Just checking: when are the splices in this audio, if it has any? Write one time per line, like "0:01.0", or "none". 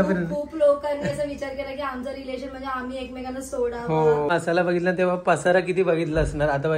0:04.3

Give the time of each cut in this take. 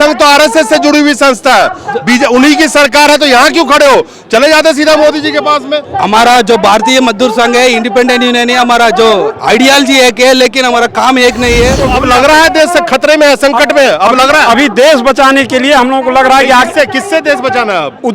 0:11.8

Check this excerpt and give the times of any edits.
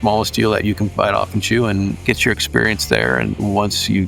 0:00.9
0:02.0
0:03.3

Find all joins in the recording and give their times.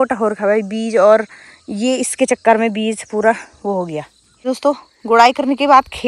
0:04.5

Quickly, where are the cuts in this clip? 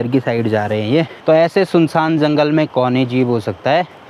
none

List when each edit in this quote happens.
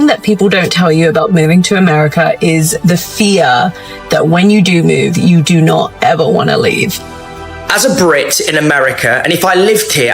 0:07.5

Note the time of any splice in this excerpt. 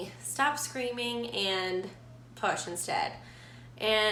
none

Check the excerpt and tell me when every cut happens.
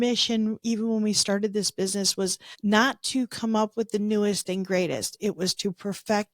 0:02.5

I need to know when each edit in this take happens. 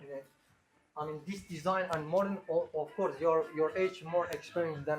none

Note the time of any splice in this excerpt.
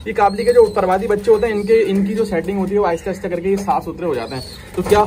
none

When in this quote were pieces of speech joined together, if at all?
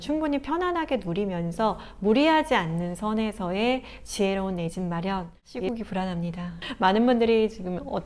0:05.2
0:06.6

